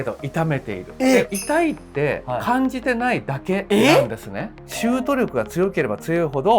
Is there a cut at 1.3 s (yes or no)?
yes